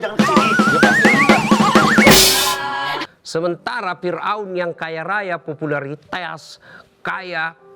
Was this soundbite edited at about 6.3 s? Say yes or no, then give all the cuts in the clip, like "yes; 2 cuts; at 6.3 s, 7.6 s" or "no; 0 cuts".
no; 1 cut; at 3.0 s